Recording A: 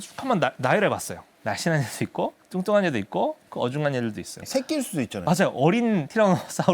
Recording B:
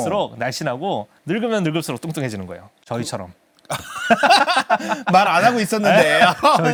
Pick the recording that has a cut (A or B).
A